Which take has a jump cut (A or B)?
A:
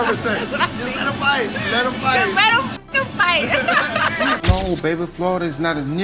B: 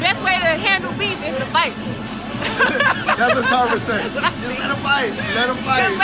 A